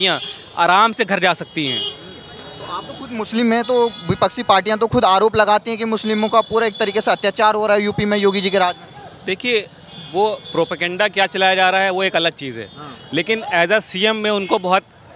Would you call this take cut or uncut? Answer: uncut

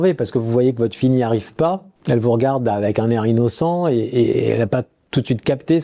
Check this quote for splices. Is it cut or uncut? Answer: uncut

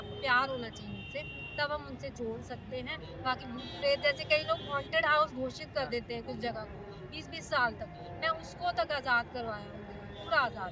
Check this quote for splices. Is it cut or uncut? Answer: uncut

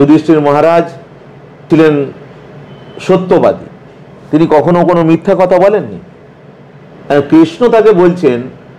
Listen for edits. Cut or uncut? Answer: cut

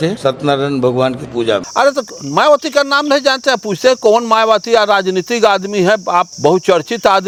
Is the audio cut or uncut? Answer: uncut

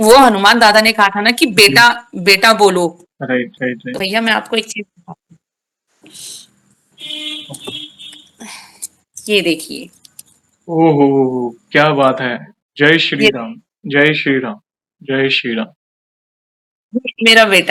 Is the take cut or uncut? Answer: uncut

